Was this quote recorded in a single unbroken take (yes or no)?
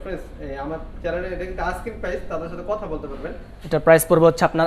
no